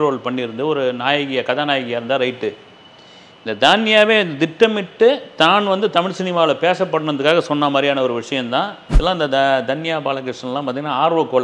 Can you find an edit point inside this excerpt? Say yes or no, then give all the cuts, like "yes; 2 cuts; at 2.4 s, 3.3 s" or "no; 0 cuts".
yes; 1 cut; at 8.8 s